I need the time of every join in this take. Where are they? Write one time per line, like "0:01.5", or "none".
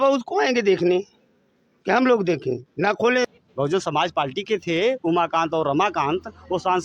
0:03.2

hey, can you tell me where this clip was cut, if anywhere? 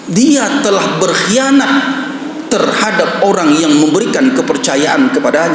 none

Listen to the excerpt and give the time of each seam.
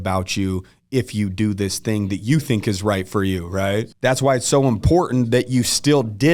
0:03.9

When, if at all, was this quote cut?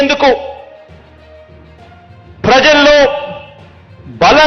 0:00.7
0:02.4

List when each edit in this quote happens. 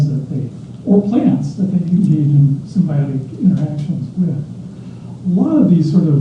none

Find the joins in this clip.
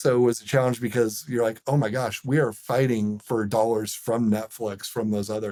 none

